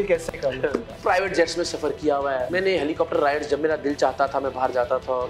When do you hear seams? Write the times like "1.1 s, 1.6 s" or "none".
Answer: 0.9 s, 2.5 s